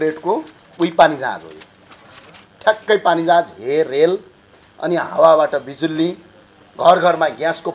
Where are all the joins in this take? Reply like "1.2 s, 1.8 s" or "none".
none